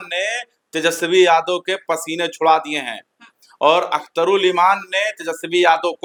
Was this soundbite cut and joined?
no; 0 cuts

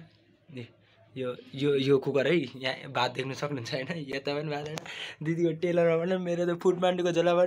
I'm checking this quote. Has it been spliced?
no; 0 cuts

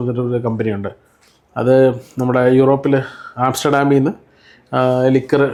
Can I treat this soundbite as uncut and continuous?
yes; 0 cuts

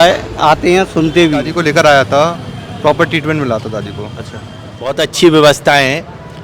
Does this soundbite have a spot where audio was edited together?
yes; 2 cuts; at 1.5 s, 5.0 s

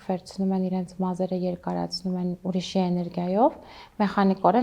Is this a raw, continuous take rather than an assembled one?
yes; 0 cuts

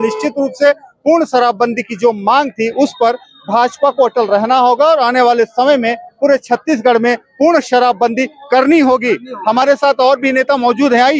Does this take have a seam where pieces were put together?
no; 0 cuts

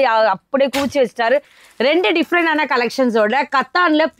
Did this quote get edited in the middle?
yes; 1 cut; at 1.5 s

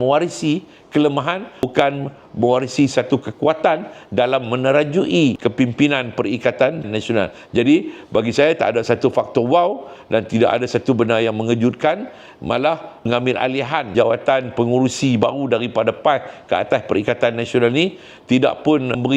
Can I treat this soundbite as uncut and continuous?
no; 3 cuts; at 1.6 s, 5.4 s, 13.1 s

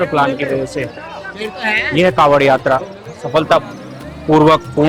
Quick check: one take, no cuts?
yes; 0 cuts

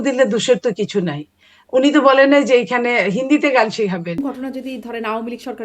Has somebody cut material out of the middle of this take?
yes; 1 cut; at 4.2 s

